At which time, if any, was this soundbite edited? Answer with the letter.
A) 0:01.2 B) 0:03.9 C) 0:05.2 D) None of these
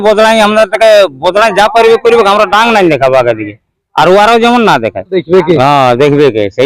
C